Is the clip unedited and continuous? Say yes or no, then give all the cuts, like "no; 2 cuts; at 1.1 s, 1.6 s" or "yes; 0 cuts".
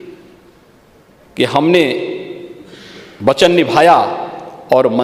yes; 0 cuts